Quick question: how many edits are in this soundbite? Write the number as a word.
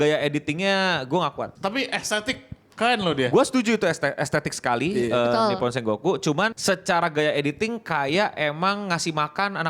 one